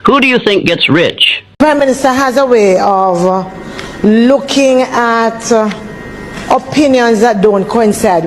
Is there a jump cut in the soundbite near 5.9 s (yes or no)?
no